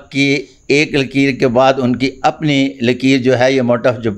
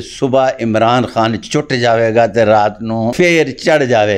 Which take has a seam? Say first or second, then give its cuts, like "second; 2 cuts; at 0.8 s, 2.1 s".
second; 1 cut; at 3.1 s